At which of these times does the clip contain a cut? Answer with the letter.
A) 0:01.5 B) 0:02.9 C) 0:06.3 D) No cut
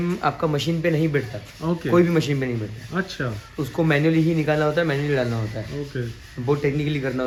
D